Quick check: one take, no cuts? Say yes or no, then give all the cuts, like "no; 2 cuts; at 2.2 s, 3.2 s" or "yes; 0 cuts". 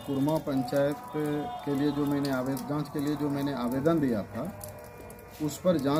yes; 0 cuts